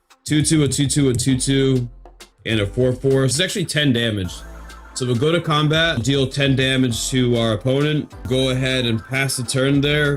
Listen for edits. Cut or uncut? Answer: cut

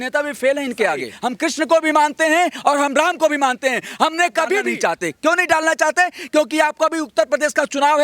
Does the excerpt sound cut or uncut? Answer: cut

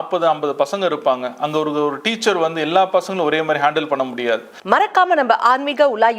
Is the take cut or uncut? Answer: cut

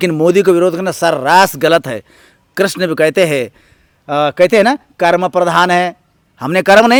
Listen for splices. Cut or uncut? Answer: uncut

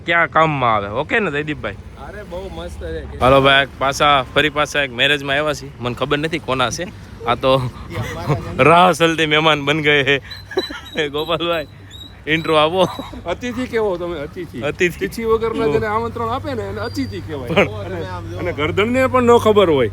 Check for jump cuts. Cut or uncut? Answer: cut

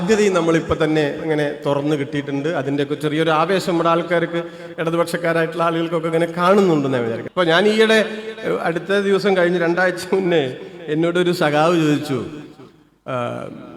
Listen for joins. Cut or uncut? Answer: cut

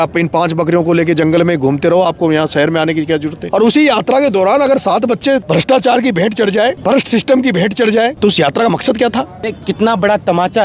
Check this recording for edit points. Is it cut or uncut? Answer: cut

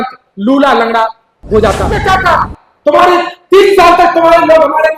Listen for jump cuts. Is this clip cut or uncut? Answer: cut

